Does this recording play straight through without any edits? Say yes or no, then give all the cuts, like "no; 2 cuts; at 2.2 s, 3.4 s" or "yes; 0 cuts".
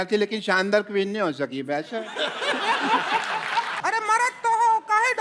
no; 1 cut; at 3.7 s